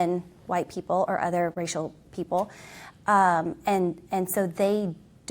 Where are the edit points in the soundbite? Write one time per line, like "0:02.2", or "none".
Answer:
0:01.5

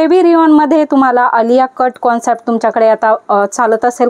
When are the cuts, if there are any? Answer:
none

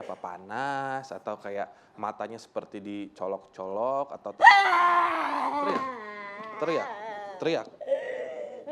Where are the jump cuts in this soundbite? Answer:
0:04.3

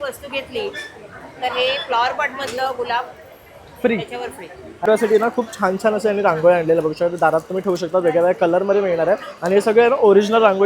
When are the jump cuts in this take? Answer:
0:04.9

